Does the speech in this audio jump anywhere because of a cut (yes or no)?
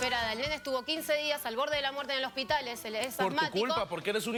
no